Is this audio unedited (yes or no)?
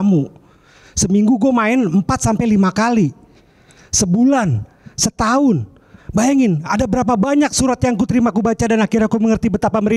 yes